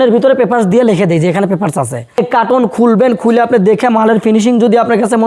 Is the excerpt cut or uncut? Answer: cut